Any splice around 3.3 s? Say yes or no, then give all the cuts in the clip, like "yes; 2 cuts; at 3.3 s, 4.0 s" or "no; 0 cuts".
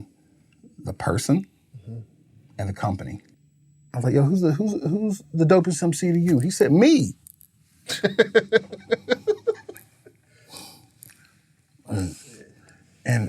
yes; 1 cut; at 3.3 s